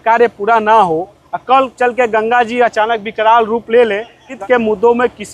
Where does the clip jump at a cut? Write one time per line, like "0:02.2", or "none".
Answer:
0:04.3

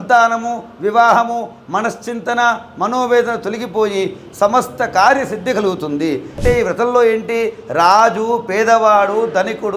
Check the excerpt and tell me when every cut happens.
0:06.4

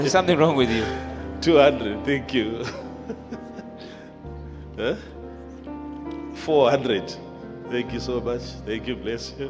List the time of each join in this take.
none

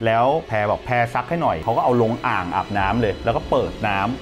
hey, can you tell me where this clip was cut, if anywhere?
0:01.6

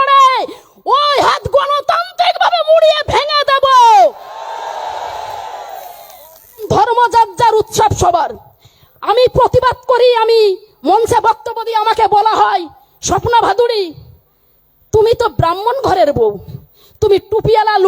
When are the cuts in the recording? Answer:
0:06.6

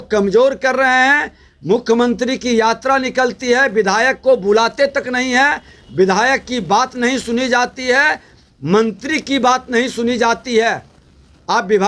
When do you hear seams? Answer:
none

